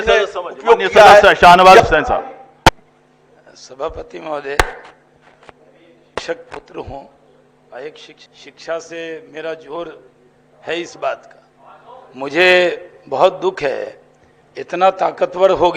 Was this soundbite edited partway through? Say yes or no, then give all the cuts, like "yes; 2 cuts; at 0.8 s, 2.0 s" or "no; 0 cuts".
no; 0 cuts